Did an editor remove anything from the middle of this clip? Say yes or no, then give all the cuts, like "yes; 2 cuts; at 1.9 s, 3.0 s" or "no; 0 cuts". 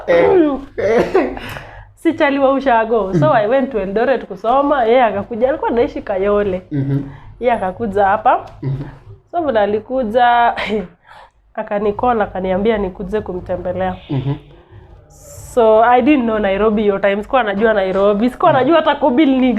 no; 0 cuts